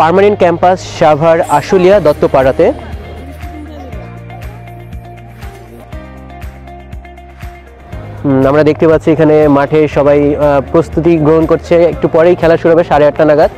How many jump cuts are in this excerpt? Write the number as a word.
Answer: zero